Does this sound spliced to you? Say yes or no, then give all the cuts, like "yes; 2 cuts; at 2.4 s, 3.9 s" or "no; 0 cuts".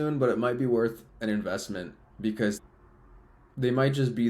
yes; 1 cut; at 2.6 s